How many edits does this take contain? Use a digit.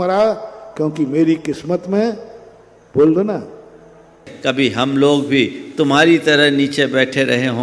1